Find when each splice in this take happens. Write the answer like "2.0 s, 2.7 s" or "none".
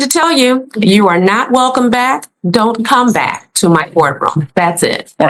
none